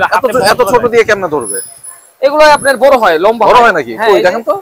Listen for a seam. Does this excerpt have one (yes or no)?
no